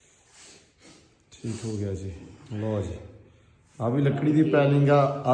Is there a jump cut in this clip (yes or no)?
no